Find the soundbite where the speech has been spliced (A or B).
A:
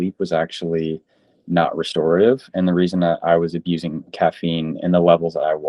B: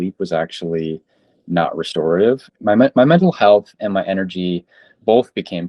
B